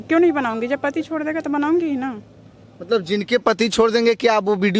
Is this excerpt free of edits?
yes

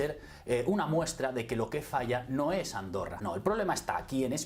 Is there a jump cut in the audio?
yes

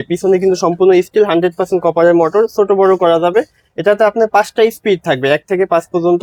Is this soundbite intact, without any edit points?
yes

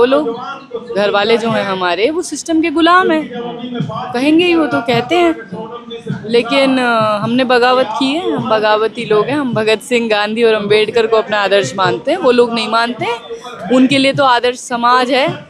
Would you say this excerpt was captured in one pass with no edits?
yes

